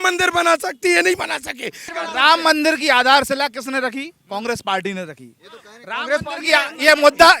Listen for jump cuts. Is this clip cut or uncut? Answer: cut